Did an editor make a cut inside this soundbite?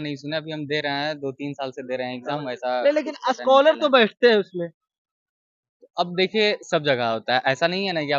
no; 0 cuts

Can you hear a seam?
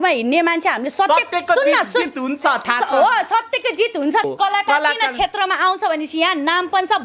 yes; 1 cut; at 4.3 s

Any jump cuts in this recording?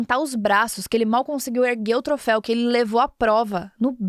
no; 0 cuts

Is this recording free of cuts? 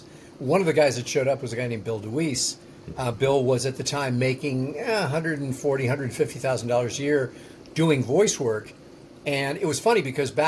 yes; 0 cuts

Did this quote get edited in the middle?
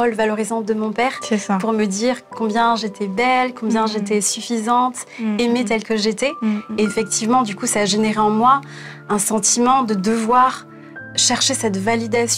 no; 0 cuts

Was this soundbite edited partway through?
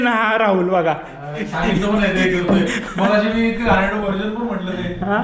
no; 0 cuts

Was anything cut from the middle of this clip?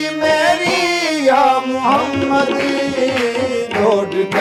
no; 0 cuts

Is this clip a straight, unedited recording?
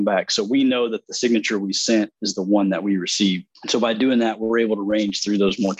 no; 1 cut; at 3.5 s

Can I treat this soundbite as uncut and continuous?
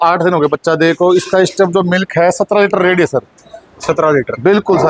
yes; 0 cuts

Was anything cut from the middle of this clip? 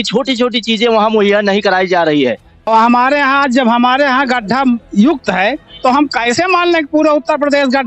yes; 1 cut; at 2.7 s

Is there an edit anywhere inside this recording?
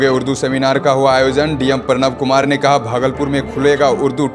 no; 0 cuts

